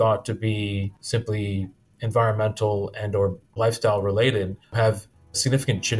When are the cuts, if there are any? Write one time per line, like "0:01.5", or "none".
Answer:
0:03.4
0:04.8